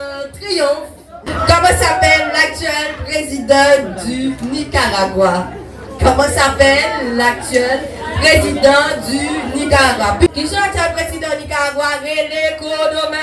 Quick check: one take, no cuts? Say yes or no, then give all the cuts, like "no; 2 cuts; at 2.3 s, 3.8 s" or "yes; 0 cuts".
no; 2 cuts; at 1.2 s, 10.3 s